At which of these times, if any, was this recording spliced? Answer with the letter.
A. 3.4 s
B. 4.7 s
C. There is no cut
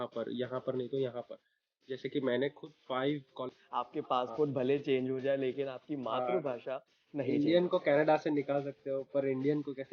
A